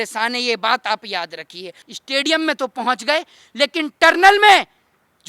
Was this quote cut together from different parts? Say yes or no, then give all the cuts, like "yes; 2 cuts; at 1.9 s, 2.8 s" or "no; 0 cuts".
yes; 1 cut; at 1.8 s